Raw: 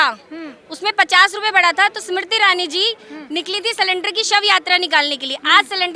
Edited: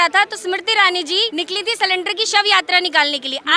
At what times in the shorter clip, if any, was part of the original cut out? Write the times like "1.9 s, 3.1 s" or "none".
1.3 s

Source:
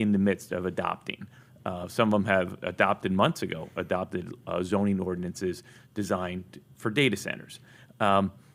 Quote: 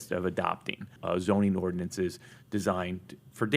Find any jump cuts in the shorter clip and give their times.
0.9 s

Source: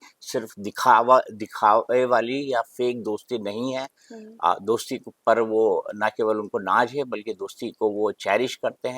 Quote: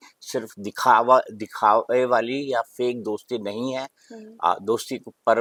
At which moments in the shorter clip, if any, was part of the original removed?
none

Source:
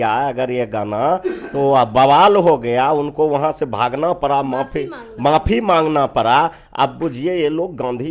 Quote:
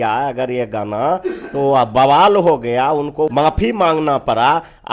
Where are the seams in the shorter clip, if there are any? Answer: 3.3 s

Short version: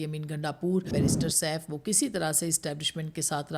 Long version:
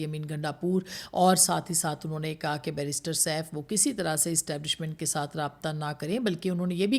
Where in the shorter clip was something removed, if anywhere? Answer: 0.9 s

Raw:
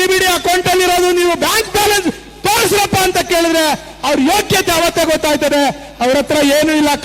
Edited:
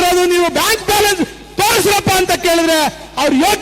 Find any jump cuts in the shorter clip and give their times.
none

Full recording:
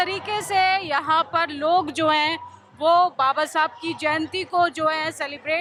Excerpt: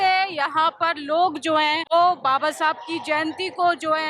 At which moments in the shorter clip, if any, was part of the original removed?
1.8 s

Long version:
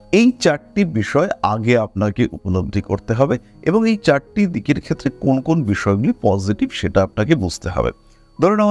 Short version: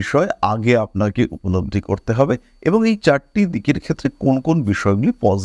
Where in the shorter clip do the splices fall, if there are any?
none

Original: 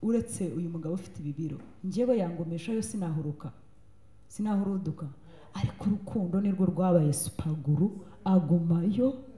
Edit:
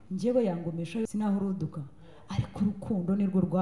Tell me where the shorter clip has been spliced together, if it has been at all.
1.1 s

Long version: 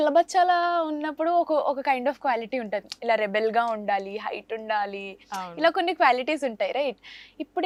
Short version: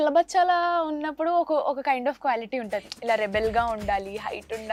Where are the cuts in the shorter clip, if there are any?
none

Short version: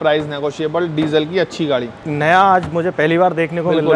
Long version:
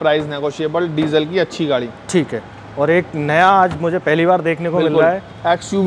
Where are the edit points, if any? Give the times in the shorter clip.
2.0 s

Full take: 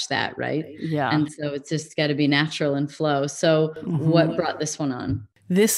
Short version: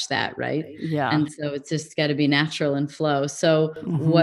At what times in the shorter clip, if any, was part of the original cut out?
none

